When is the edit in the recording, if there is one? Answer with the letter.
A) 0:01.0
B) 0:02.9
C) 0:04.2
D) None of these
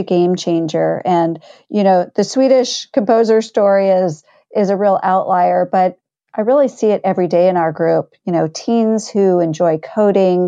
D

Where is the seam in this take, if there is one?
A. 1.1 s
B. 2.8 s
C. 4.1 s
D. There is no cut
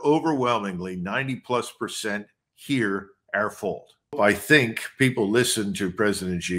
C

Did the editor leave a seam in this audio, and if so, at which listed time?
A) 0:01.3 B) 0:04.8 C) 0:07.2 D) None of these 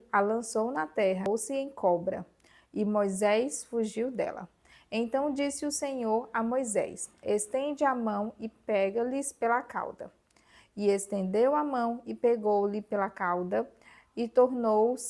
A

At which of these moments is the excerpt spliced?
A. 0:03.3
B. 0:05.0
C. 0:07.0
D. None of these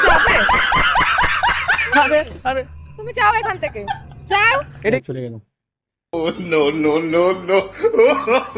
B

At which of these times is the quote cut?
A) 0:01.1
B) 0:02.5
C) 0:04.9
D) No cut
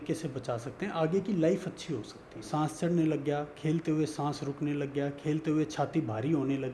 B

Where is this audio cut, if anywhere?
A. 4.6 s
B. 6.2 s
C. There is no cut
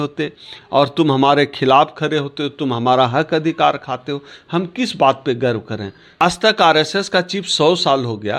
B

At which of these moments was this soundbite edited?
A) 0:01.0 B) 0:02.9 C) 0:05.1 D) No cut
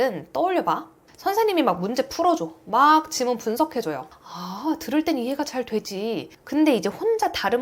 A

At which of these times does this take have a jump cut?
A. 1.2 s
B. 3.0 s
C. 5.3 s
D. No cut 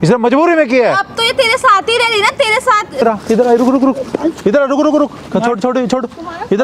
B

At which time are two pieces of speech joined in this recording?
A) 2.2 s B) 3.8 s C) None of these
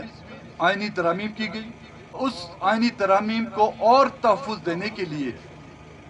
A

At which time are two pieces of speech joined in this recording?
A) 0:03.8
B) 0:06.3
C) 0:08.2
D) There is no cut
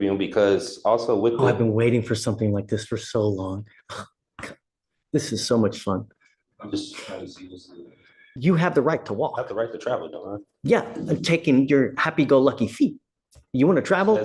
C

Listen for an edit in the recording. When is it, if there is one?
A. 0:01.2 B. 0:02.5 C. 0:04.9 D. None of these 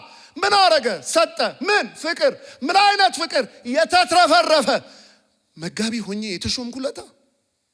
D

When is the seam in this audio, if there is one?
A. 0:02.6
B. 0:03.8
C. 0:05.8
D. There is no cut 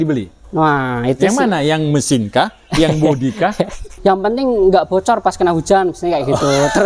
B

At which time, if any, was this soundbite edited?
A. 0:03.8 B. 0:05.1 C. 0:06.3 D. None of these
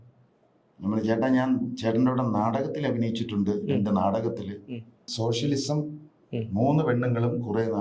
B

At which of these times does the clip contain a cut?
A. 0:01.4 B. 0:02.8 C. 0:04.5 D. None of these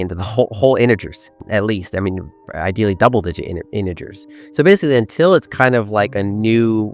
A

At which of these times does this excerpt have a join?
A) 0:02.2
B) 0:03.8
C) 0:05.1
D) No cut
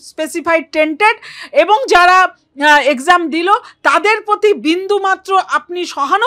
D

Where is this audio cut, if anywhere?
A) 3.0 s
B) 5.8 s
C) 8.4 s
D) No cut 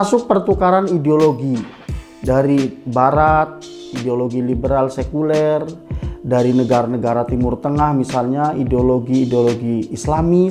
D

